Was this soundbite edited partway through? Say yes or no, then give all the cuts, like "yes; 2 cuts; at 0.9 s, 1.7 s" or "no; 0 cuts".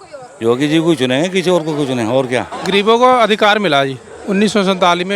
yes; 1 cut; at 2.5 s